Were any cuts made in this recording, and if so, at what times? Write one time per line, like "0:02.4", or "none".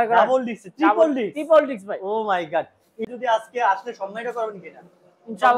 0:03.0